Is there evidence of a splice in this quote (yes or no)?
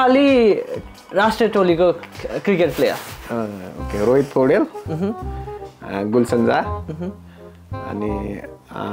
no